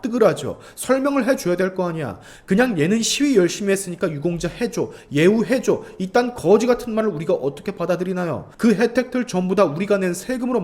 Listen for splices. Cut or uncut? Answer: cut